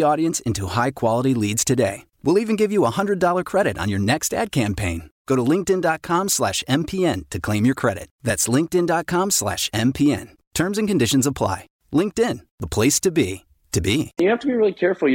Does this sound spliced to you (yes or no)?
yes